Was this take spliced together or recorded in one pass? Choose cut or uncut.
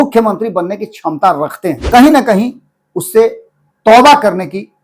cut